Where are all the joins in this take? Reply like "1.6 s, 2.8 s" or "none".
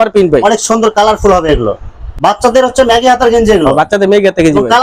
2.0 s

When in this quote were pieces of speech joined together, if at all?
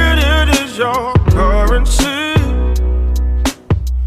none

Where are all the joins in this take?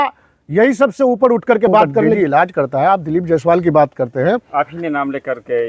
2.1 s

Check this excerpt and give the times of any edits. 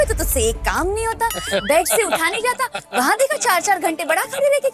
none

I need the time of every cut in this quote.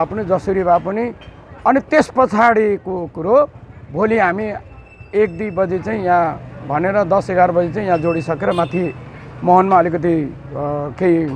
none

